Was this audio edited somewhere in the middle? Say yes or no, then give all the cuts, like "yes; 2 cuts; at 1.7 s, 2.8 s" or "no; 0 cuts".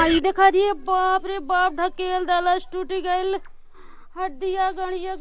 no; 0 cuts